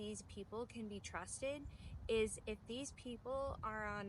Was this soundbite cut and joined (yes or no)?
no